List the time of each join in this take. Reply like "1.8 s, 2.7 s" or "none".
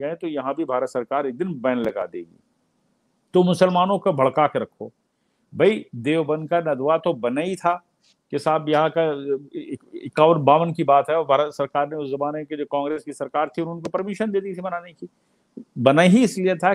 none